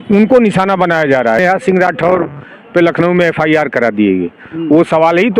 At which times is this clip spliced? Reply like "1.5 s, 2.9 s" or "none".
1.4 s